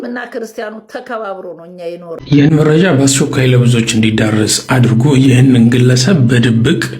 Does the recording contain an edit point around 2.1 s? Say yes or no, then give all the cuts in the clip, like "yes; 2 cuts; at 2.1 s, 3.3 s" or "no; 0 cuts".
yes; 1 cut; at 2.1 s